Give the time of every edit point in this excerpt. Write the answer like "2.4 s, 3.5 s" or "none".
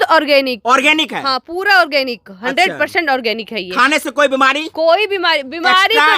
none